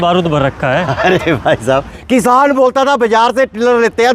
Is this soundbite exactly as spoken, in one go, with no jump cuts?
no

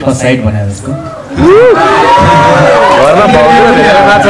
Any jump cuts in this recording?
no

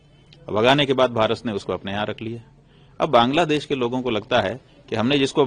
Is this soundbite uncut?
yes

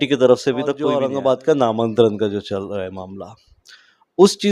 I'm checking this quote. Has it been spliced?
yes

